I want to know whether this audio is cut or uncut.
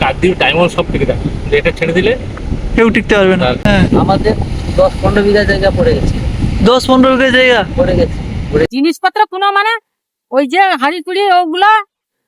cut